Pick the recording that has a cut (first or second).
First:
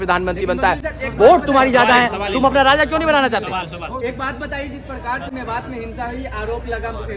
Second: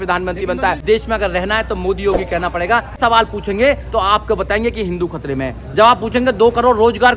second